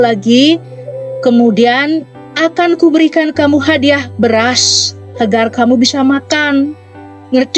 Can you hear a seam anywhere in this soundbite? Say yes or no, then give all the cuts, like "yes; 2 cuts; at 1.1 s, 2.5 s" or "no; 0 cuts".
no; 0 cuts